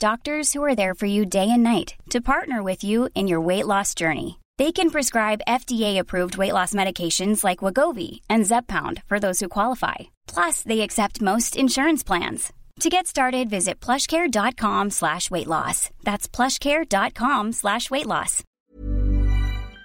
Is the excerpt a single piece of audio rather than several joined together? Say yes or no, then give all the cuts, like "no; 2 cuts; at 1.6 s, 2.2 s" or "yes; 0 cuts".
no; 1 cut; at 18.4 s